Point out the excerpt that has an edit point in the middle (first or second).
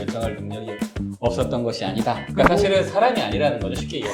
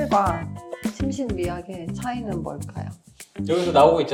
first